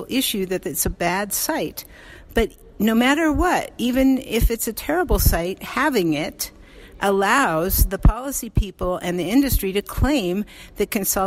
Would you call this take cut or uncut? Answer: uncut